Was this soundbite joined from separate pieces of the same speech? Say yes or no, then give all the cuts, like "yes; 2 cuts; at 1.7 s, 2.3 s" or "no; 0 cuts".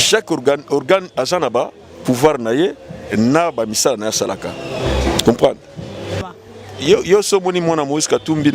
yes; 1 cut; at 6.2 s